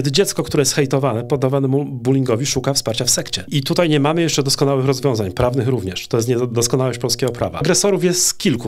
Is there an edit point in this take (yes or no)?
yes